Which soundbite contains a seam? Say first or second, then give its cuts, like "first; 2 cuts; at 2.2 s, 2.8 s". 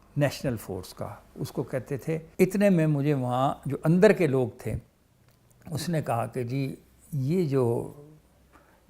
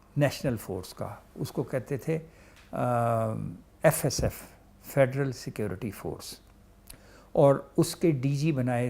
first; 1 cut; at 2.3 s